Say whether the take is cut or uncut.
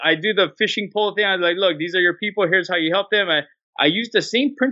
uncut